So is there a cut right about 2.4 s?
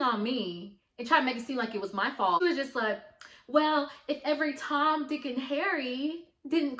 yes; 1 cut; at 2.4 s

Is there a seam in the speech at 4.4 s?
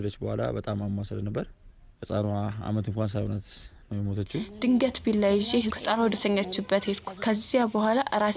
yes; 1 cut; at 4.4 s

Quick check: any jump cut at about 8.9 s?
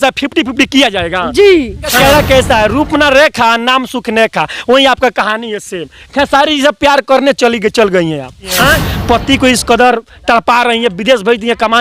yes; 2 cuts; at 2.0 s, 8.9 s

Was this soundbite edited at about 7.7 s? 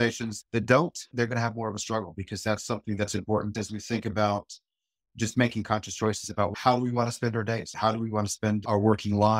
yes; 3 cuts; at 3.5 s, 6.5 s, 7.7 s

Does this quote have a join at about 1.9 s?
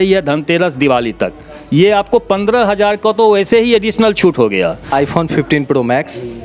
no; 1 cut; at 4.9 s

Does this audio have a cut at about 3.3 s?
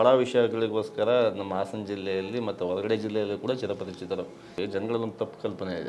no; 1 cut; at 4.5 s

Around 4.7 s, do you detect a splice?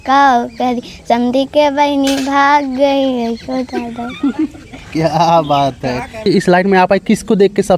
no; 1 cut; at 6.2 s

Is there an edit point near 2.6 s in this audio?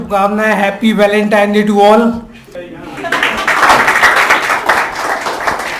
yes; 1 cut; at 2.6 s

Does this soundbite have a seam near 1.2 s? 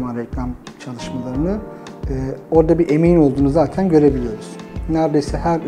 no; 0 cuts

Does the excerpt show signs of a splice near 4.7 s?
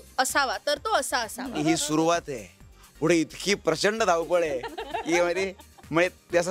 no; 1 cut; at 1.6 s

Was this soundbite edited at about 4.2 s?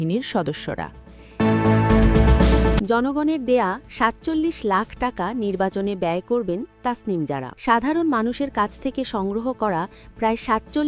no; 3 cuts; at 1.2 s, 2.8 s, 7.5 s

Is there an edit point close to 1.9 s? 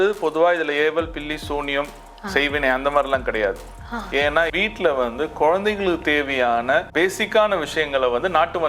no; 2 cuts; at 4.5 s, 6.9 s

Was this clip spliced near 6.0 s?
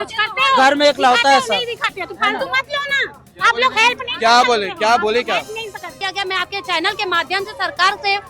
yes; 1 cut; at 6.0 s

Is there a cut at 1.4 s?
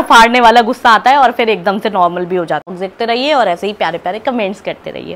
no; 1 cut; at 2.7 s

